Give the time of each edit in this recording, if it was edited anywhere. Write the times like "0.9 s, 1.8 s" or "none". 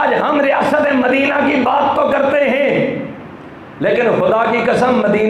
none